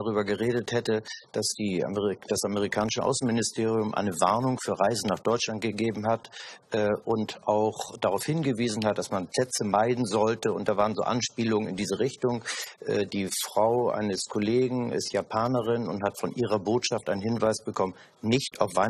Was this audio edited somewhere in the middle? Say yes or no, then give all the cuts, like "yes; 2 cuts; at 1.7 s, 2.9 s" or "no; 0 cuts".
no; 0 cuts